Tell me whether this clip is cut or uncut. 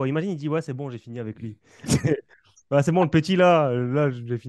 uncut